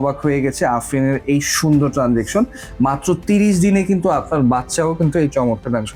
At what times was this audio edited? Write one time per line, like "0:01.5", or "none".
none